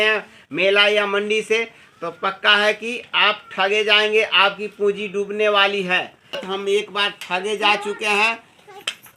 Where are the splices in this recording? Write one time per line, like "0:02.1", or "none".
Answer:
0:06.4